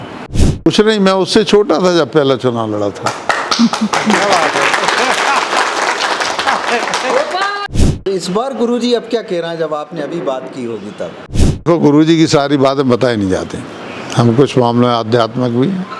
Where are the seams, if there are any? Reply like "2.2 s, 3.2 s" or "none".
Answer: 7.7 s, 11.7 s